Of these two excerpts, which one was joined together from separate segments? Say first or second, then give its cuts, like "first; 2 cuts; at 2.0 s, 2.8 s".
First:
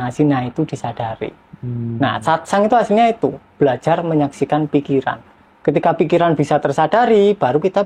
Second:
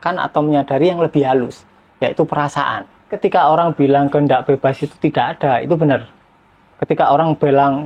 second; 1 cut; at 3.1 s